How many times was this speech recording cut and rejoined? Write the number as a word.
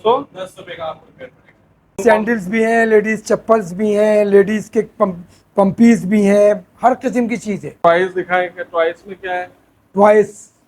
two